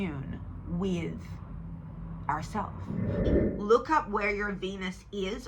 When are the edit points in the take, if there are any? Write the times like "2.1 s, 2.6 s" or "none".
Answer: 3.2 s